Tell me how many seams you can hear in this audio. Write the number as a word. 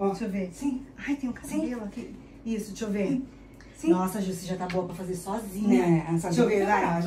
zero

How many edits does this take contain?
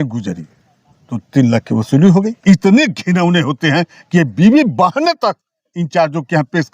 one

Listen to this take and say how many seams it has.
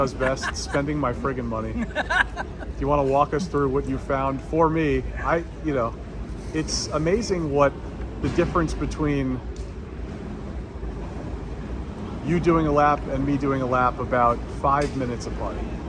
zero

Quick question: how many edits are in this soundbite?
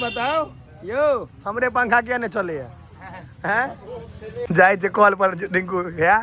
one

